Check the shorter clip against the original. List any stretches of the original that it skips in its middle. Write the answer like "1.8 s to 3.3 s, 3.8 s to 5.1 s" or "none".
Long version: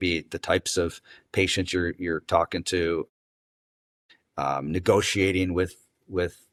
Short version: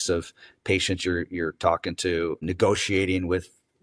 3.1 s to 4.7 s